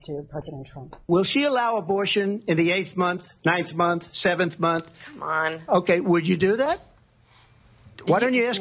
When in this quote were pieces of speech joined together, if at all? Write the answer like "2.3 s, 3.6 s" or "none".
0.9 s